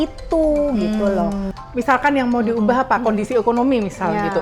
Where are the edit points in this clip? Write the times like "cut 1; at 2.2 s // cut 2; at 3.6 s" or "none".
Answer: cut 1; at 1.5 s